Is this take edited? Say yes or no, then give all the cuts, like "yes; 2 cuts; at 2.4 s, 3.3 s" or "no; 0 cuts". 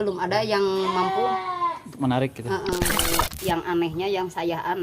yes; 1 cut; at 3.0 s